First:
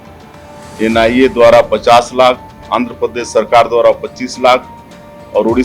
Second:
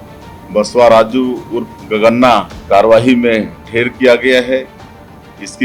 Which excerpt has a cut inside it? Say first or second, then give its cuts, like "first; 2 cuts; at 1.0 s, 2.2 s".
second; 1 cut; at 2.5 s